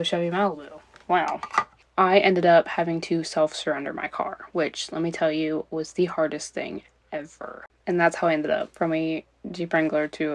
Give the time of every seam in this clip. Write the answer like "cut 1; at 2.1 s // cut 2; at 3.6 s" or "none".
cut 1; at 1.8 s // cut 2; at 7.6 s